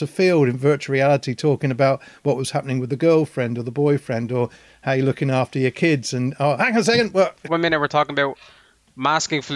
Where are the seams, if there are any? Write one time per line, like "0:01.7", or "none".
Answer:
0:07.4